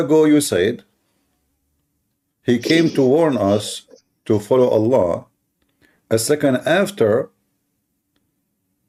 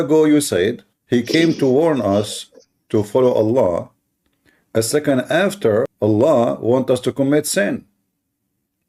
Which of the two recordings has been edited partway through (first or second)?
second